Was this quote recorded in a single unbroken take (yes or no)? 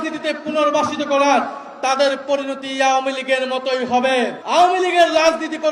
no